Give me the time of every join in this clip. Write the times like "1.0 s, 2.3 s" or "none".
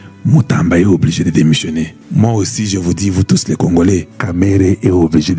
2.0 s, 4.2 s